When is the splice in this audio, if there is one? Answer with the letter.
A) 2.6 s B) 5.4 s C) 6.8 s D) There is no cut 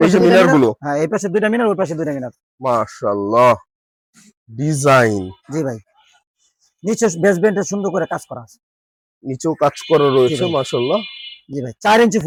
D